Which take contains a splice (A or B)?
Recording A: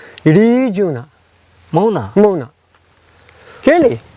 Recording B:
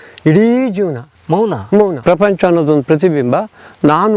B